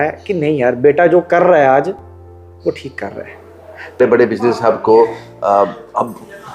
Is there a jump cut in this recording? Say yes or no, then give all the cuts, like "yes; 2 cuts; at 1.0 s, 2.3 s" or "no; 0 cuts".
yes; 1 cut; at 4.0 s